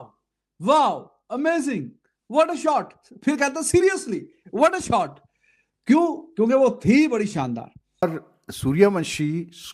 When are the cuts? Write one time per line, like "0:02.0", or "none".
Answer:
0:08.0